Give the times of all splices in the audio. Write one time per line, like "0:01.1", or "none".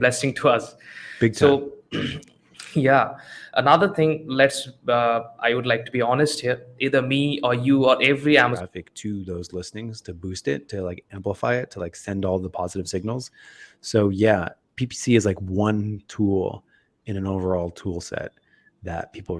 0:08.6